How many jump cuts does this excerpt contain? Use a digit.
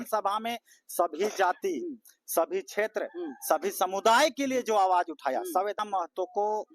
1